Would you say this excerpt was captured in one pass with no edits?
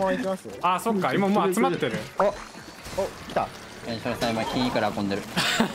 no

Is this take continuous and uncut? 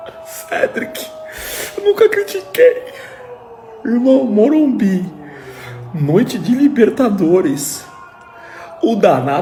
yes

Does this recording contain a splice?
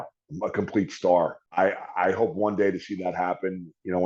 yes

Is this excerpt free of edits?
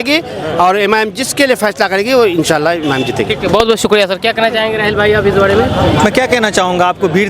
yes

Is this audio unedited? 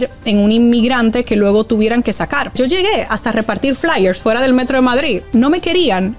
no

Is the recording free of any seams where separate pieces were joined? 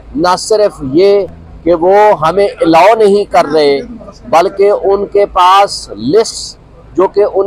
yes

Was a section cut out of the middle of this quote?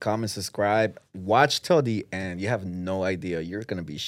no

